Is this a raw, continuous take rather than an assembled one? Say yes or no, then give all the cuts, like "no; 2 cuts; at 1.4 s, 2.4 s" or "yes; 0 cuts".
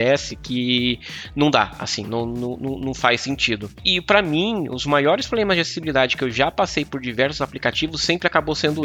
yes; 0 cuts